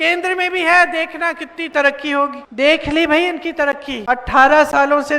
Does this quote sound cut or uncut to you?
cut